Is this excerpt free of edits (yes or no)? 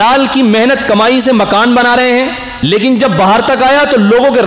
no